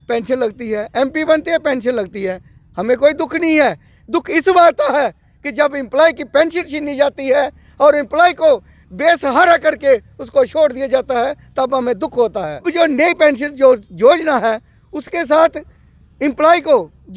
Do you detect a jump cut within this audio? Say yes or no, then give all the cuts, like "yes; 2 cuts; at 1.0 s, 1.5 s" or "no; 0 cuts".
yes; 1 cut; at 12.7 s